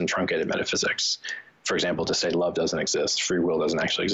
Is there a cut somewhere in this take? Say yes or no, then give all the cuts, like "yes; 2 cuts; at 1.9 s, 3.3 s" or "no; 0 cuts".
no; 0 cuts